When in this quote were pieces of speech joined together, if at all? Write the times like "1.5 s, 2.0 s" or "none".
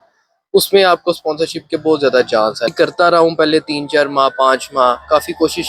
2.7 s